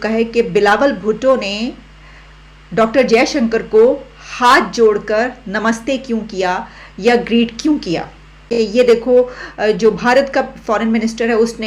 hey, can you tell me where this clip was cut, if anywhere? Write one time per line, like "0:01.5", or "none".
0:08.5